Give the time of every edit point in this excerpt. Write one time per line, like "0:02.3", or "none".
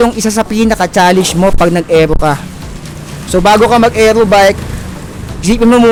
none